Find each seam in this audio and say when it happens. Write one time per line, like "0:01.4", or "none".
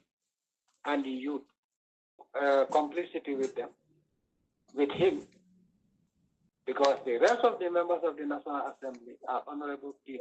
0:02.2